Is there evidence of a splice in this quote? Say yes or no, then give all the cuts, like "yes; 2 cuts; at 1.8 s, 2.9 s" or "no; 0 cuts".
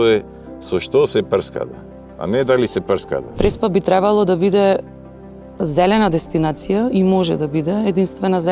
yes; 1 cut; at 3.3 s